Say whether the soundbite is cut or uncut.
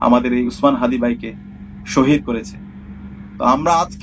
uncut